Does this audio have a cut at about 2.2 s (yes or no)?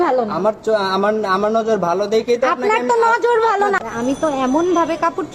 no